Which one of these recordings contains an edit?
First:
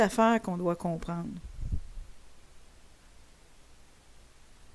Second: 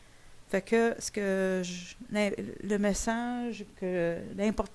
second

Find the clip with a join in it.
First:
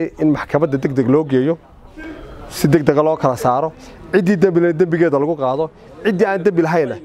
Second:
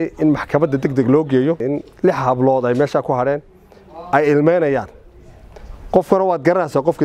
second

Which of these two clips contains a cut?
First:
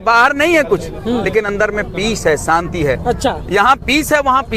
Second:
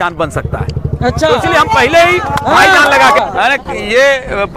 second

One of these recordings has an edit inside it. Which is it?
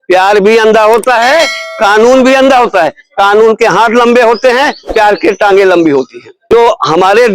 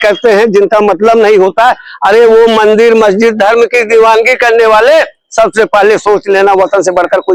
first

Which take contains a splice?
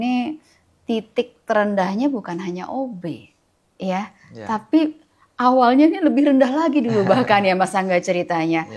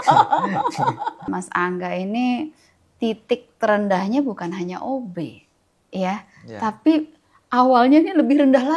second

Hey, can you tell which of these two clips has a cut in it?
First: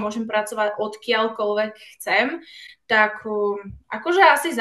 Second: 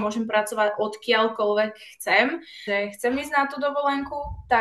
second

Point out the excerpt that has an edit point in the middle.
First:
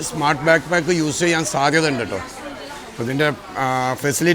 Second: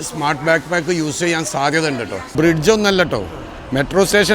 second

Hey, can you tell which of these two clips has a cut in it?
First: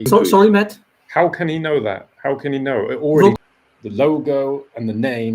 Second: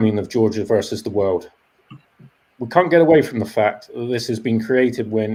first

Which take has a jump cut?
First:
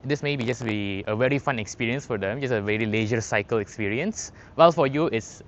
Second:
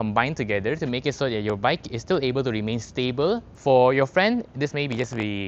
second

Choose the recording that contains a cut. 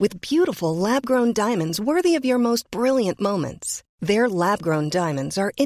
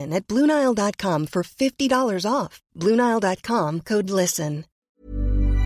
second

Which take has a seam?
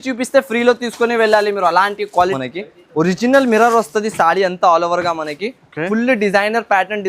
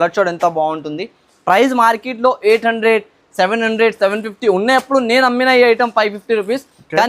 first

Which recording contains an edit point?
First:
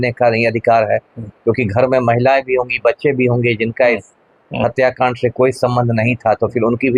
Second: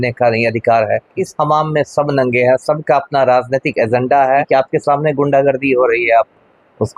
second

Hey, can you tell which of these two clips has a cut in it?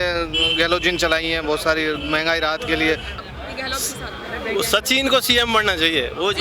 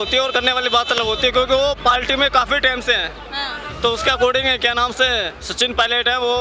first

